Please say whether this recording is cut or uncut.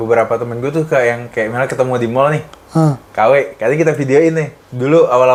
uncut